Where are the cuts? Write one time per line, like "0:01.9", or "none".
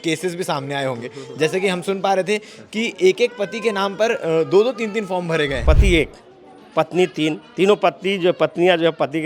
0:05.6